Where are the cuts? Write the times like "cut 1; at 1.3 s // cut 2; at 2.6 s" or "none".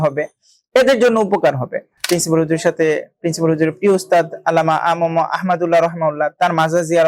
cut 1; at 1.9 s